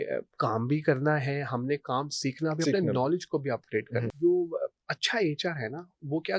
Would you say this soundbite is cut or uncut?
cut